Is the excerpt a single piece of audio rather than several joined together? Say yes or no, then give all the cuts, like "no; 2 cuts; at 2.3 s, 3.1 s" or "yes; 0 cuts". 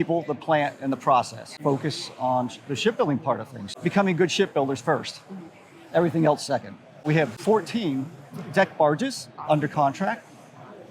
no; 2 cuts; at 1.6 s, 7.0 s